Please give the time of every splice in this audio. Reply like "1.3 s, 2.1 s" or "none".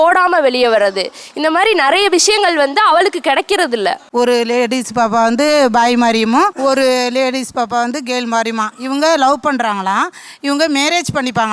4.0 s, 6.5 s